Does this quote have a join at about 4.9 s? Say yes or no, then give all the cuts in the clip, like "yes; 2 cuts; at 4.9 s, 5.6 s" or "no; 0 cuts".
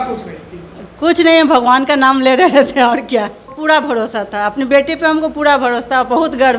no; 1 cut; at 3.5 s